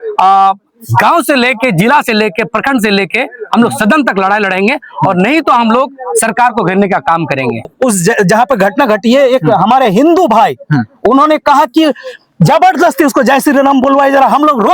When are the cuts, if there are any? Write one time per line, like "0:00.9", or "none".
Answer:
0:07.7